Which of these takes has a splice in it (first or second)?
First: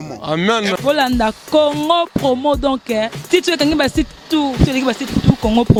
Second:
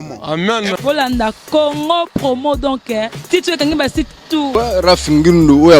second